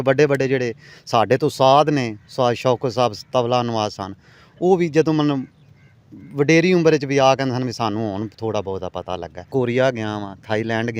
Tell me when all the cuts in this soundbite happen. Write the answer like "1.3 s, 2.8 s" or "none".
9.4 s